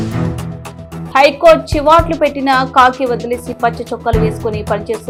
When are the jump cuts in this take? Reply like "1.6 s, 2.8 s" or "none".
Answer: none